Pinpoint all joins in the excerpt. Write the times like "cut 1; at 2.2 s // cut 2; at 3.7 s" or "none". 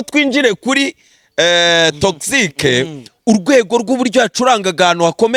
none